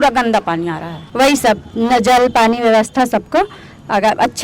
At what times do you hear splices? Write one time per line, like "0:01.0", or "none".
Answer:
0:01.0